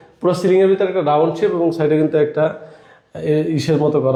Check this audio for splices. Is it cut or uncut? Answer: uncut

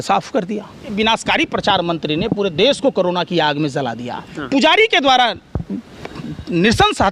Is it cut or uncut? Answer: cut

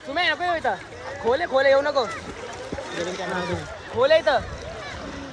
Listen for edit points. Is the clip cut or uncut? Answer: uncut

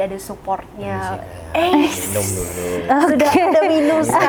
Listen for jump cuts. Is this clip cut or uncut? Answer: uncut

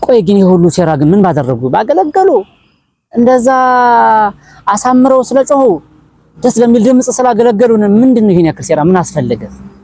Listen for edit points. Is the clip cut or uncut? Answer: uncut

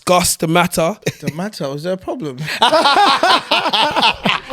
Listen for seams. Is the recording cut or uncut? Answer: cut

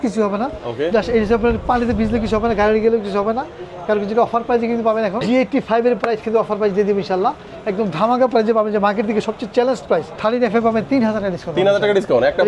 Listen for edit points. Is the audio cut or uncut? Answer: cut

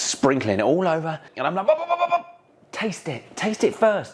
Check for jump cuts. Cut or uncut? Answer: cut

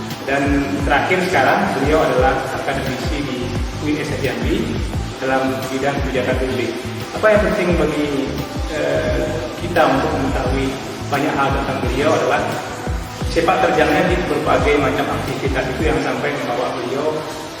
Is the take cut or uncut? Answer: uncut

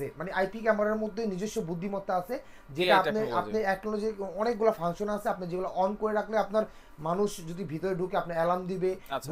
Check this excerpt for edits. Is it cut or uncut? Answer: uncut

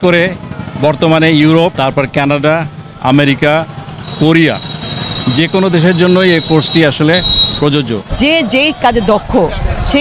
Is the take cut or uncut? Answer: cut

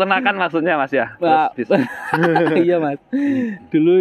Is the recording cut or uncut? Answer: uncut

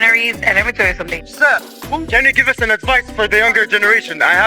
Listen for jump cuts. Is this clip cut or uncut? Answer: cut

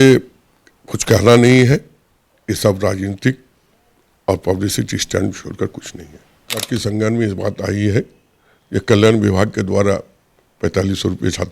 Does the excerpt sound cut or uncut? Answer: cut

